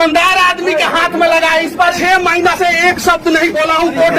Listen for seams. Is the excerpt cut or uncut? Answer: cut